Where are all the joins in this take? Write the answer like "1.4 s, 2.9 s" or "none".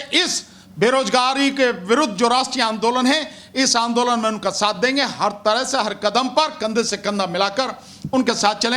none